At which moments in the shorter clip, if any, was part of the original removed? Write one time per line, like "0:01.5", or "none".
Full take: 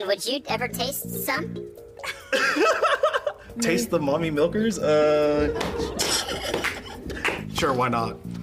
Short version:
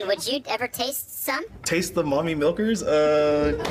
0:01.6

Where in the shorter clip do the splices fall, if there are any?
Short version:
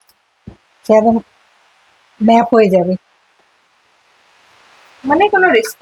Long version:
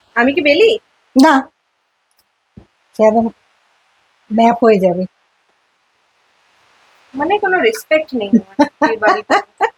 none

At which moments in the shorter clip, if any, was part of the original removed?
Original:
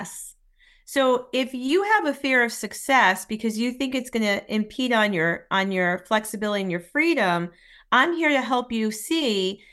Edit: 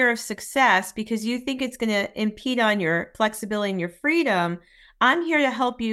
0:03.1

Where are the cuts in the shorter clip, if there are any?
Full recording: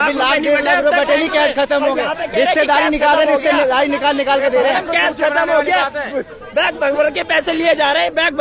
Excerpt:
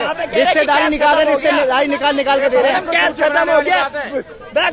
none

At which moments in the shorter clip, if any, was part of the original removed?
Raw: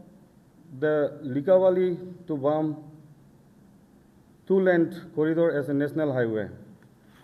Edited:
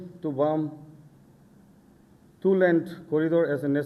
none

